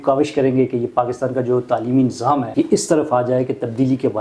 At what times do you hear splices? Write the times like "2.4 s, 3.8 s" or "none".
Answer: 2.5 s